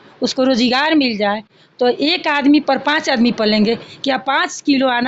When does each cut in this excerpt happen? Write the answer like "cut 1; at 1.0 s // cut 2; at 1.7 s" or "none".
none